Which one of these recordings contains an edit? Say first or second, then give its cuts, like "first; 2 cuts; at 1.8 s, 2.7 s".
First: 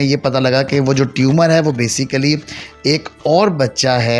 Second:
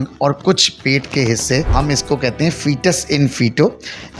second; 1 cut; at 1.7 s